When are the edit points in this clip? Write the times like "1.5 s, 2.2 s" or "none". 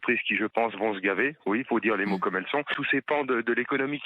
2.8 s

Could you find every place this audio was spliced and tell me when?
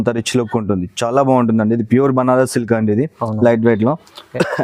none

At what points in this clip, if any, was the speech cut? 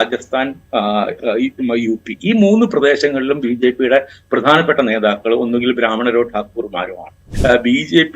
7.3 s

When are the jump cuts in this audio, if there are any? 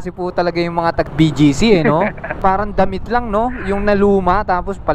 1.1 s, 2.3 s

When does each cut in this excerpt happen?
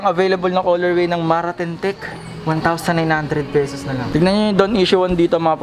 4.1 s

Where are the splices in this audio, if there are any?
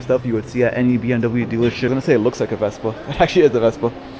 1.9 s

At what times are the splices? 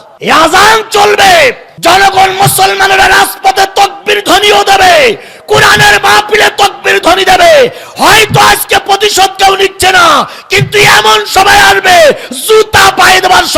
none

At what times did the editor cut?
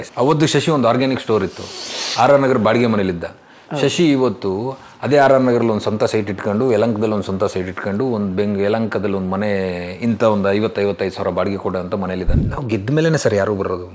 12.4 s

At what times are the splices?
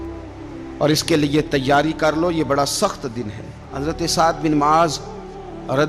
3.7 s

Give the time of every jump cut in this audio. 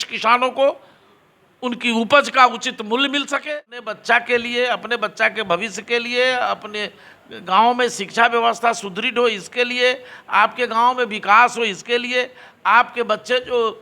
3.8 s

